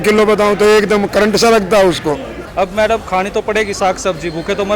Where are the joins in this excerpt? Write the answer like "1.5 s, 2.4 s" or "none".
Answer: 2.4 s